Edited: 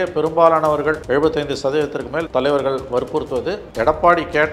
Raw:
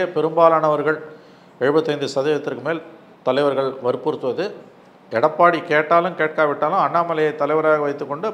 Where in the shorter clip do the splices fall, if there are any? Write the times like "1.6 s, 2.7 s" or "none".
1.0 s, 2.3 s, 3.6 s